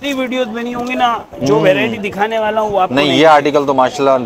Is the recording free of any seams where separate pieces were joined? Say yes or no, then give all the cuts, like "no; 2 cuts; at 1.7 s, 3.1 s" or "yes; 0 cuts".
yes; 0 cuts